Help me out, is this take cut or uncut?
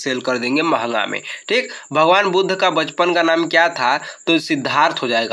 uncut